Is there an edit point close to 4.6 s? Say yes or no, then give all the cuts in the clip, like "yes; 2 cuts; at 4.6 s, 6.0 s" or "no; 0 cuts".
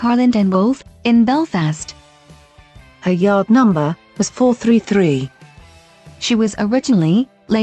yes; 1 cut; at 4.6 s